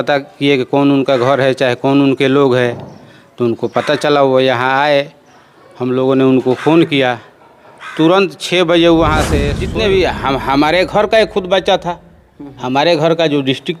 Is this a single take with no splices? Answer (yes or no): no